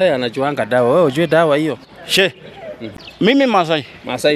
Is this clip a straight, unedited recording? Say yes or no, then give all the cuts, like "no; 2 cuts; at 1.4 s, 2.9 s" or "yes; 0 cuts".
no; 1 cut; at 2.9 s